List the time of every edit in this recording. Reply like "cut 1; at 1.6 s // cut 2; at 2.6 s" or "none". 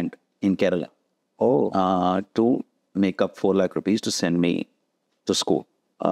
none